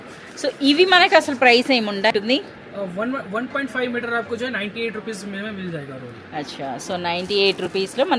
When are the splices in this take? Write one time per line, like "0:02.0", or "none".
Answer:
none